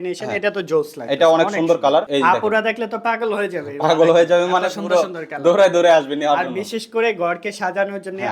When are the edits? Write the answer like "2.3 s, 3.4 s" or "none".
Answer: none